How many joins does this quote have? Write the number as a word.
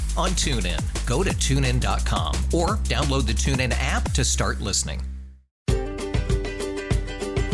one